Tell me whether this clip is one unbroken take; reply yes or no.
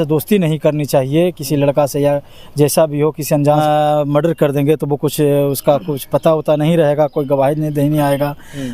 no